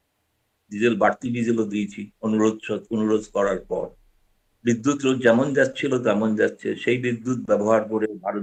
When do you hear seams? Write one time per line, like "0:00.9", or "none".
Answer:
none